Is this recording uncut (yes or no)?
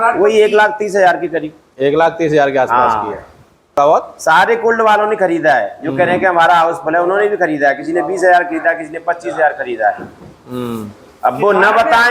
no